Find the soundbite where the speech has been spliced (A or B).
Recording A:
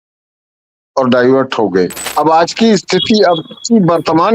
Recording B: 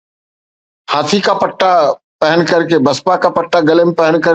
A